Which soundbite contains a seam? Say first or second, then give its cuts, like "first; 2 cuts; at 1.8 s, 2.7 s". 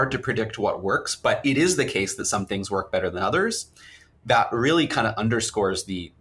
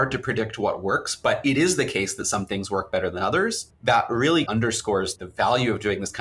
second; 2 cuts; at 3.7 s, 4.7 s